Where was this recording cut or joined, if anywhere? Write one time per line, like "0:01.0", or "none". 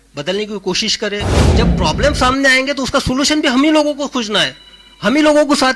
0:01.4